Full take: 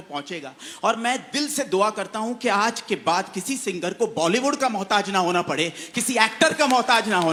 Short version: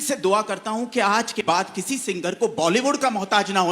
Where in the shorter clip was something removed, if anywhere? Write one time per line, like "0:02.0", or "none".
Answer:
0:01.4

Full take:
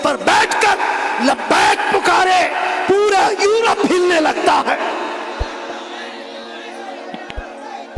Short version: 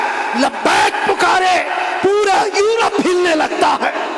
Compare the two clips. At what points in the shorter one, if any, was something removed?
none

